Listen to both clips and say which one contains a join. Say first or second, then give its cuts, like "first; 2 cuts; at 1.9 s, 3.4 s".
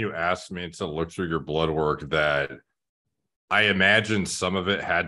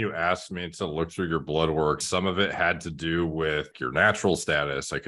second; 2 cuts; at 2.0 s, 3.8 s